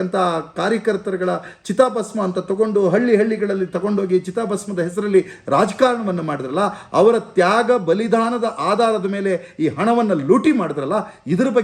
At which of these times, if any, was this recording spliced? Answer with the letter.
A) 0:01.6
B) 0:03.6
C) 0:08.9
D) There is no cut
D